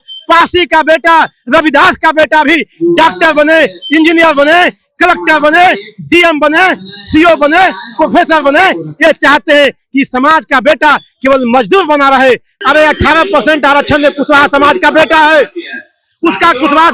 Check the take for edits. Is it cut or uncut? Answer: cut